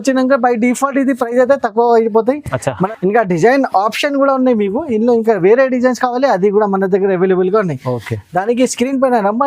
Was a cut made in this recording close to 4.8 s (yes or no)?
no